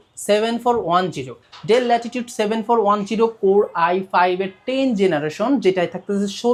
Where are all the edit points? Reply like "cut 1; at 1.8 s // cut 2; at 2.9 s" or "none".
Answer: none

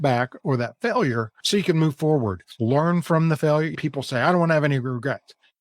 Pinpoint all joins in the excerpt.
cut 1; at 1.3 s // cut 2; at 2.4 s // cut 3; at 3.7 s

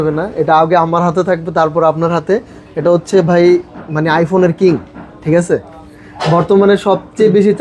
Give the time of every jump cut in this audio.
none

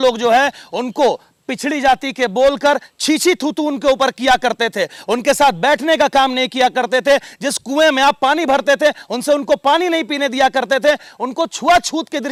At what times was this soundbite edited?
none

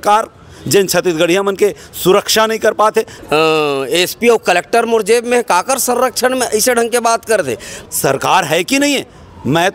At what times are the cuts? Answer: cut 1; at 3.2 s // cut 2; at 7.7 s

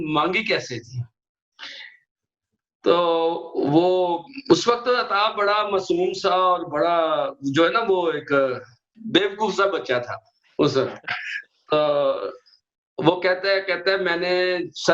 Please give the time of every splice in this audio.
cut 1; at 9.0 s

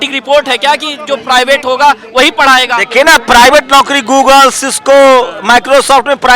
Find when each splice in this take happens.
none

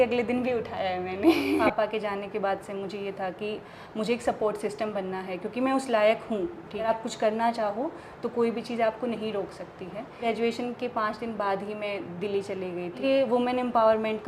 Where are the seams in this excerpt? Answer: cut 1; at 1.6 s // cut 2; at 6.9 s // cut 3; at 10.3 s // cut 4; at 13.0 s

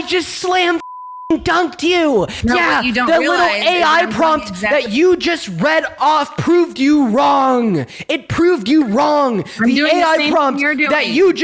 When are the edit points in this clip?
cut 1; at 2.4 s

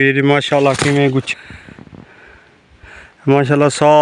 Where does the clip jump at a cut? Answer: cut 1; at 1.3 s

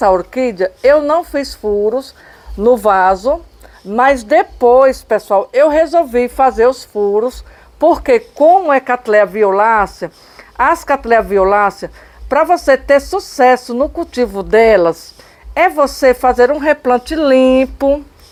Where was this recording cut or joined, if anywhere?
none

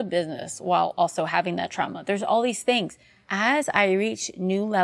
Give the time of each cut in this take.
cut 1; at 3.3 s

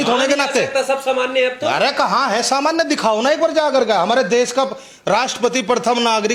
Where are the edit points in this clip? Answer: none

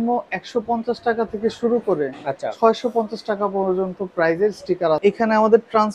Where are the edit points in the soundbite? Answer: cut 1; at 5.0 s

